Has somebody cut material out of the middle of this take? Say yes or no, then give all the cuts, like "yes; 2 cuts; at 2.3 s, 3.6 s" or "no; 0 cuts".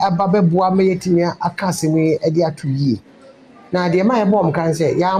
no; 0 cuts